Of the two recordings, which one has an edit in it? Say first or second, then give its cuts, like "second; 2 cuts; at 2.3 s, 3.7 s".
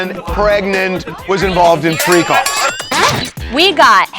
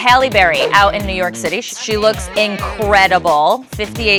first; 1 cut; at 3.0 s